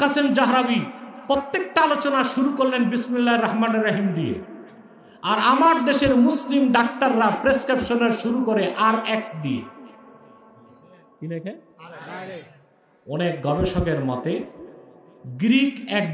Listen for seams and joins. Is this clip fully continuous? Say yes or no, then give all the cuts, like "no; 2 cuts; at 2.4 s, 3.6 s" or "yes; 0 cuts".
yes; 0 cuts